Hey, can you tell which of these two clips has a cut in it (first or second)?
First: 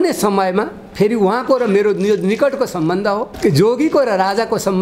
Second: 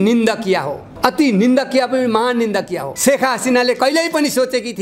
second